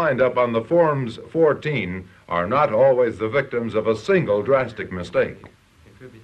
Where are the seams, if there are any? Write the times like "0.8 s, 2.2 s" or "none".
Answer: none